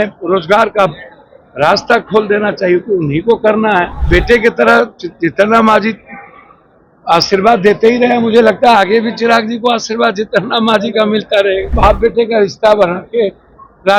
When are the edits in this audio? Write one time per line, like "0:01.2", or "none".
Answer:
0:04.0
0:11.7